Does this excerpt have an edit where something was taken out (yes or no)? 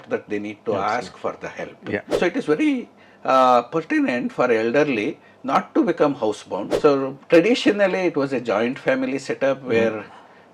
yes